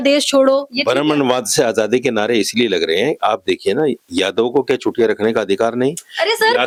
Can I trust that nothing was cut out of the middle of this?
yes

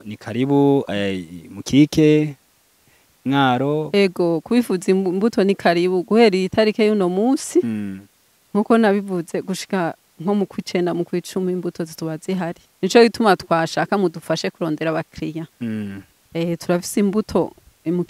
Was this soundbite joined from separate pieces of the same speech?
yes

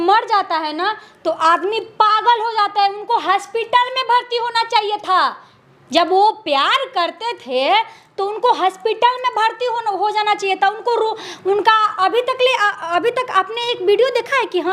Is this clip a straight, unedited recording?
yes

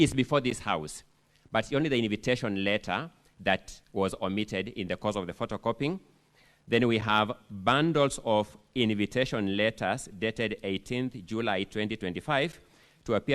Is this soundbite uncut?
yes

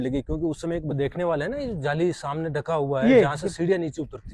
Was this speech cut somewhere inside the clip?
yes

